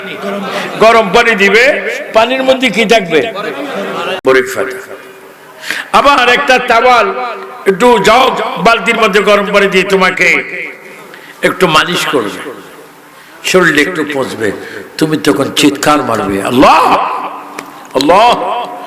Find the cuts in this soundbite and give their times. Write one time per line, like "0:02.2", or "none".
0:04.1

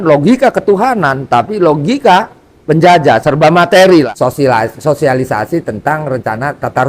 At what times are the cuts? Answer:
0:04.1

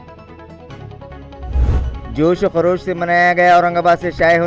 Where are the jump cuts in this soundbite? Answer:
0:01.9

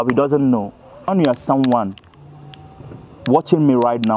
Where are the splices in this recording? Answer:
0:01.1

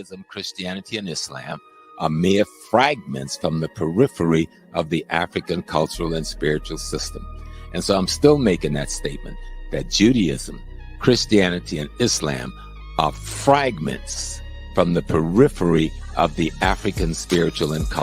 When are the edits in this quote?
0:01.0

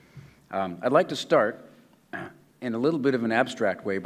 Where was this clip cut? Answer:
0:01.2

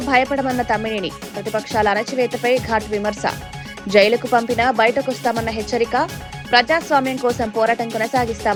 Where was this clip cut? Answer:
none

